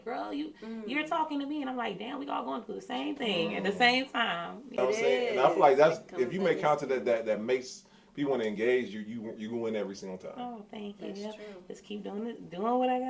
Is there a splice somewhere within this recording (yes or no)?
yes